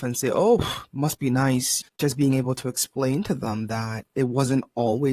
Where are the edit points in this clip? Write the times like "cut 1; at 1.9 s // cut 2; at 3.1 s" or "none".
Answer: cut 1; at 2.0 s